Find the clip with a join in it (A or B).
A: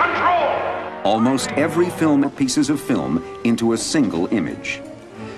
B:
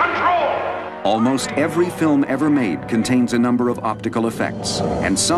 B